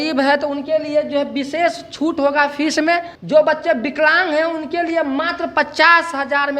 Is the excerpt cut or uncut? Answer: cut